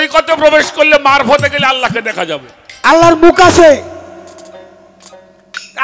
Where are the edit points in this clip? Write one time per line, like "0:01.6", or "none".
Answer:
0:02.8